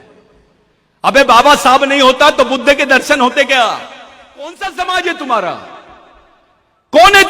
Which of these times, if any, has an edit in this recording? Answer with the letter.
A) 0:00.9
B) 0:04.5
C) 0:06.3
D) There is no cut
B